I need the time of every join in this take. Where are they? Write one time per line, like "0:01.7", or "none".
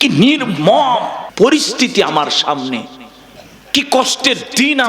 0:01.2